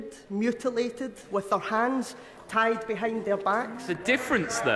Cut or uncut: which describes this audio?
cut